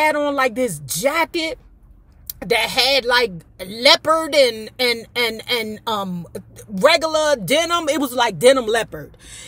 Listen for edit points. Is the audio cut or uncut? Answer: uncut